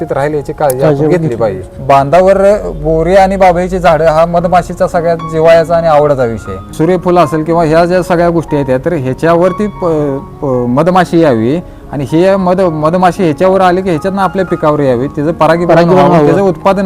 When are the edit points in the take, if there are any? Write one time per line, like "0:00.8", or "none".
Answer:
0:01.7
0:06.7